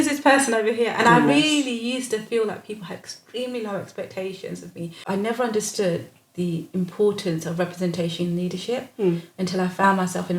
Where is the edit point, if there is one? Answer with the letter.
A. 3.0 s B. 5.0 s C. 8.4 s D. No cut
B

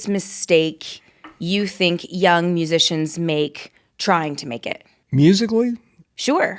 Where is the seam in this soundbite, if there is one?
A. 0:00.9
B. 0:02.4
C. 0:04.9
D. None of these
C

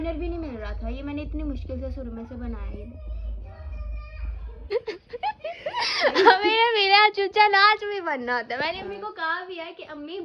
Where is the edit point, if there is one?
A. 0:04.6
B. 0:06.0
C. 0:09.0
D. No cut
A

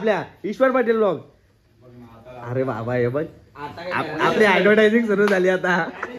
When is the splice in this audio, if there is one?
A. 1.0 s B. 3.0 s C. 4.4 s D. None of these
D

